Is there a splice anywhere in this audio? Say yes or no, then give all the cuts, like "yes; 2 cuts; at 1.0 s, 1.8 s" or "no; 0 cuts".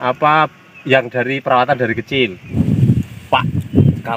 yes; 1 cut; at 2.5 s